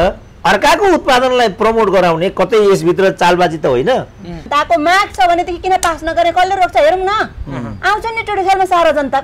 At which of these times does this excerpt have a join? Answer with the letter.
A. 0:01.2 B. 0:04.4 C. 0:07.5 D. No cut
B